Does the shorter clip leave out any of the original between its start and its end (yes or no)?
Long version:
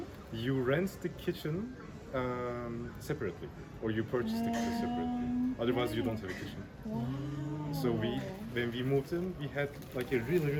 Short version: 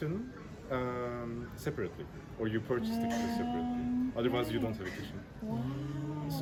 no